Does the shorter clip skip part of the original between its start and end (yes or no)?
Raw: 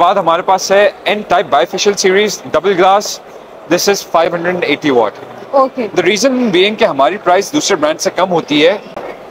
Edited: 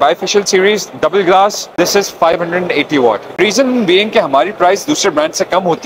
yes